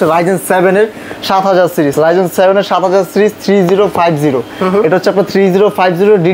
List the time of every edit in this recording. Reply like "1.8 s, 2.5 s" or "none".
none